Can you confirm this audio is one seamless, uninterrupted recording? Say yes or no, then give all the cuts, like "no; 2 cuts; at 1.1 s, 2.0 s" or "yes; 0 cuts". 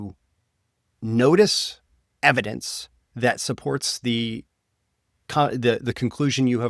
yes; 0 cuts